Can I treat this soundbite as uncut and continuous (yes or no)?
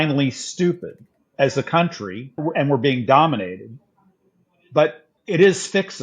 no